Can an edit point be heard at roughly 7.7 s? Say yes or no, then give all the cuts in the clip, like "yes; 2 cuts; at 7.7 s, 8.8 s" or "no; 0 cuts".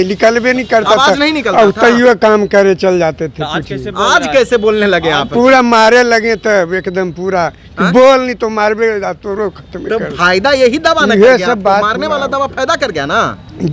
no; 0 cuts